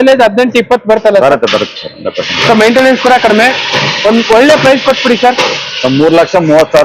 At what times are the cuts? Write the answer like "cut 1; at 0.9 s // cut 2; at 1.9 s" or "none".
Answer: none